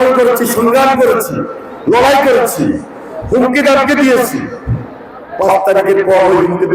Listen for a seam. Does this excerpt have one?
no; 0 cuts

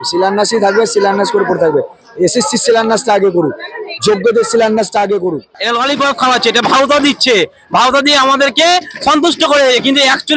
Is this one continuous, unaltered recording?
no; 1 cut; at 5.5 s

